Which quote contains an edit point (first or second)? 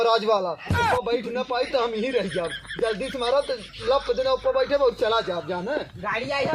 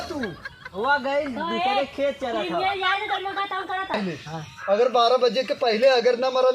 second